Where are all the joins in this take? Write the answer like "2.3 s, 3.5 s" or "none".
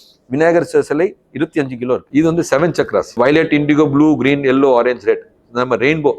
2.1 s, 3.2 s